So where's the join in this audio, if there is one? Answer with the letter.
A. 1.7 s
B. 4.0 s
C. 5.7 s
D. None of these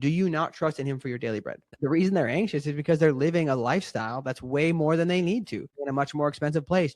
A